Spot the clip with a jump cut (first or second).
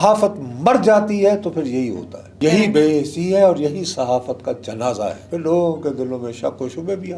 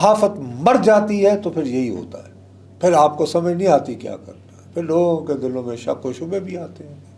first